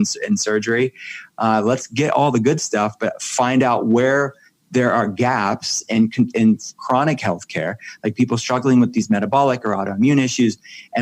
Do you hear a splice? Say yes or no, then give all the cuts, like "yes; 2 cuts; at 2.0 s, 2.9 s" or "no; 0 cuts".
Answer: no; 0 cuts